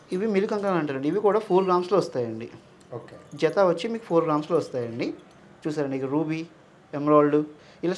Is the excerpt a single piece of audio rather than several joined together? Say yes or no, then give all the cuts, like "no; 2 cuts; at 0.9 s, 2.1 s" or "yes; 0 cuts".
yes; 0 cuts